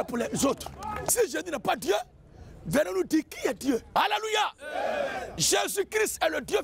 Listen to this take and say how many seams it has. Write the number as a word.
two